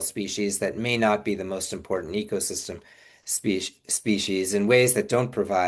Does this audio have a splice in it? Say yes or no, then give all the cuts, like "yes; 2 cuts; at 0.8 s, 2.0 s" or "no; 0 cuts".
no; 0 cuts